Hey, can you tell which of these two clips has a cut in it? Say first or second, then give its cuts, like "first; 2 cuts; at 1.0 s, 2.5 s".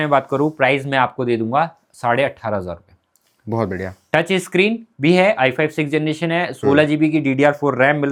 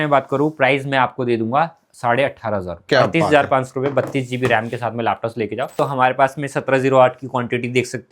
second; 2 cuts; at 2.8 s, 5.8 s